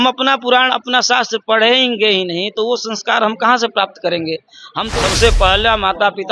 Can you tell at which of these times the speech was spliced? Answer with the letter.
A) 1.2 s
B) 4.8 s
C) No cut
B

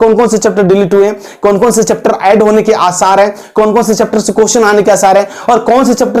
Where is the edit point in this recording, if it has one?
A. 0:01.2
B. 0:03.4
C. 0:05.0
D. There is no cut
D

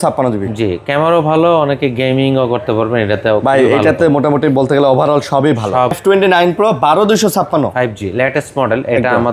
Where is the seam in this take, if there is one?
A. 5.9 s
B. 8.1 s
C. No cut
A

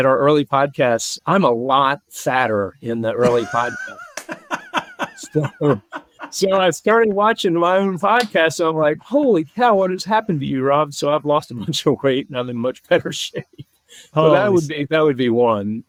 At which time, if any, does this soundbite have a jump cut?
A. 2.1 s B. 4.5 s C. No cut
C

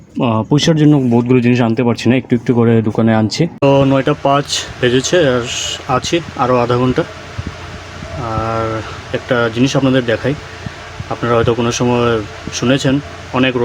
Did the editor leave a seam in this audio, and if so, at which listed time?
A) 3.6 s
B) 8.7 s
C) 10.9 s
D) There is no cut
A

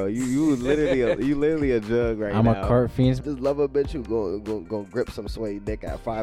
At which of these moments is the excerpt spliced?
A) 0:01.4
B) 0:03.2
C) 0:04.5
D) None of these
B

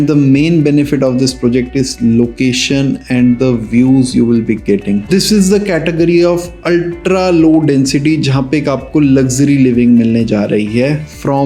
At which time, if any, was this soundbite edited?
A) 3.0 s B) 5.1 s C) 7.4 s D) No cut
B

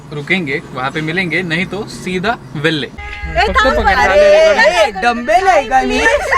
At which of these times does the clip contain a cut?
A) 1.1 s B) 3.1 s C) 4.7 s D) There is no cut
B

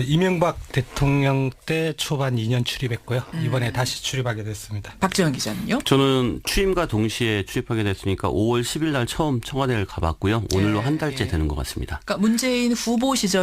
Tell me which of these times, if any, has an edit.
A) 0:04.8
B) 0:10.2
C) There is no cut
B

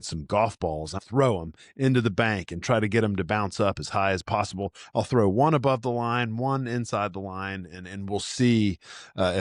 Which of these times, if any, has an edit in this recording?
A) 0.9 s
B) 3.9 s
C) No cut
A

